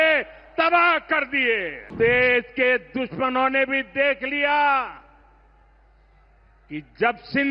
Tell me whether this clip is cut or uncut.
cut